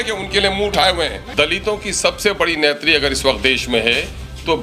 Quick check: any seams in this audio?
yes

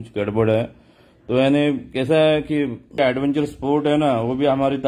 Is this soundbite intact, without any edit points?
no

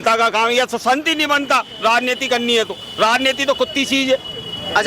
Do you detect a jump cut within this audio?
no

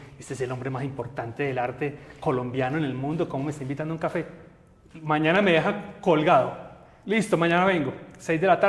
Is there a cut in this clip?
no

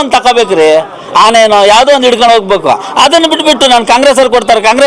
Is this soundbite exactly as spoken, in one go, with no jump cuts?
yes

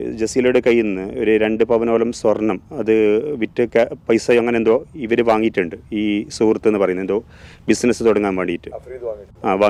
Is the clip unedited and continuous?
yes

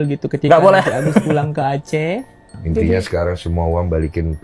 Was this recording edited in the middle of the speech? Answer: no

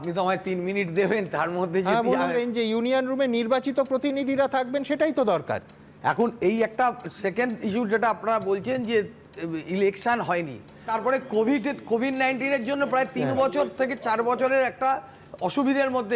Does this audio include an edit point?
yes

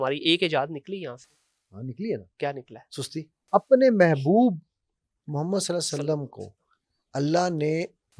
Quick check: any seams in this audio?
yes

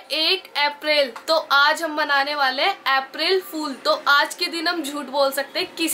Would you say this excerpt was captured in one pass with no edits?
yes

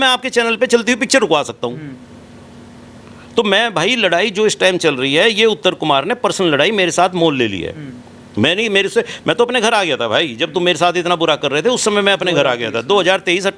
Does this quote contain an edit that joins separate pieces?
no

